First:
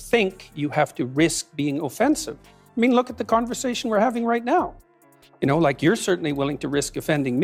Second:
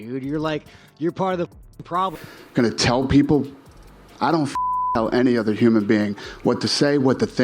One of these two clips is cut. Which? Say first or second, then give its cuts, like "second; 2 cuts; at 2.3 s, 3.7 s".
second; 1 cut; at 2.2 s